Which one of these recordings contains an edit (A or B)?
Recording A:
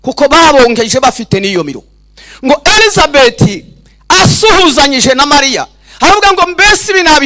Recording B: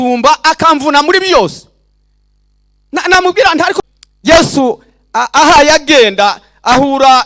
B